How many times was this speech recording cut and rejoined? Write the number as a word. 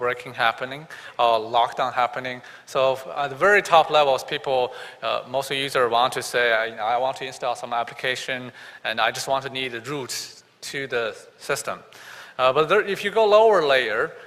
zero